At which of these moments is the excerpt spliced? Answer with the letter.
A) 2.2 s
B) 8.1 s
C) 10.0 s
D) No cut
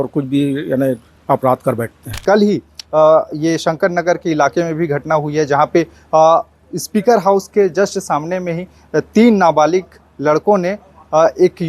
A